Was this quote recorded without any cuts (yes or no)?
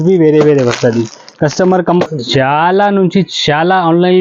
no